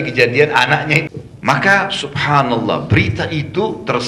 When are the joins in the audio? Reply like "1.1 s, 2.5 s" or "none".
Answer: 1.1 s